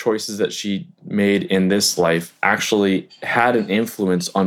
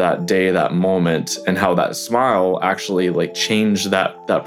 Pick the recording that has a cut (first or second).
first